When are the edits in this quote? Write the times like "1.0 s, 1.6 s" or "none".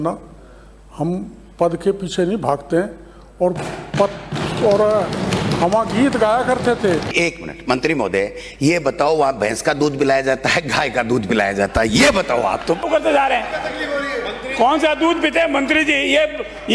7.1 s, 12.8 s

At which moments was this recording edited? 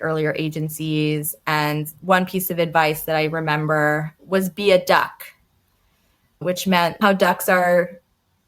4.1 s, 7.0 s

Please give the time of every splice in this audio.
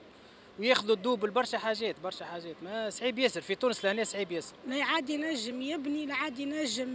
4.5 s

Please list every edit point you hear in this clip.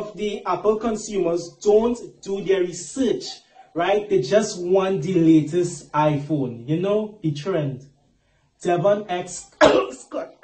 4.3 s, 6.6 s

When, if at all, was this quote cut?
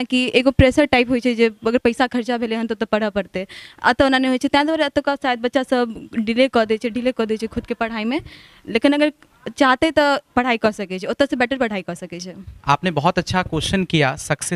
12.5 s

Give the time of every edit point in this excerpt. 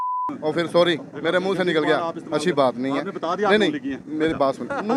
none

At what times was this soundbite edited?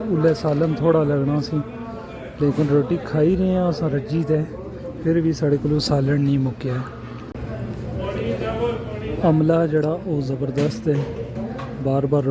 7.3 s

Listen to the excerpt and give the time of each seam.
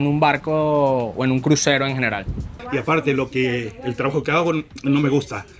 2.5 s

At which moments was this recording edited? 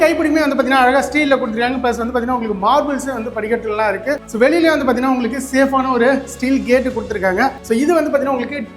4.2 s, 7.6 s

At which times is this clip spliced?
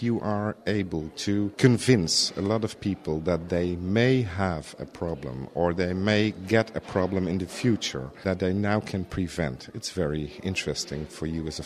1.5 s, 8.2 s

